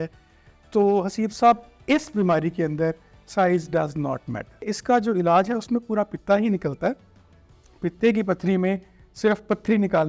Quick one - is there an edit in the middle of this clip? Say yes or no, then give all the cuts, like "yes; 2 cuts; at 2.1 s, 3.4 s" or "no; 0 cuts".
yes; 1 cut; at 4.7 s